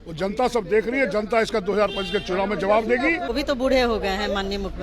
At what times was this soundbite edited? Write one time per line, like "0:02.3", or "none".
0:03.3